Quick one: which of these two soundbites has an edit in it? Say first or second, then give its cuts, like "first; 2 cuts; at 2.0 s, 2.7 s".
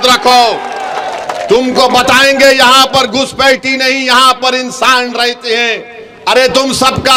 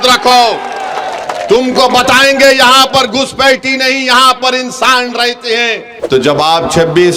second; 1 cut; at 5.9 s